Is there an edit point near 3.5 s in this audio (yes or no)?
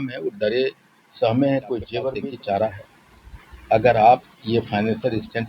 no